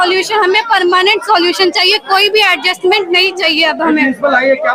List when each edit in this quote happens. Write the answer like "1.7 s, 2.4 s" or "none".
none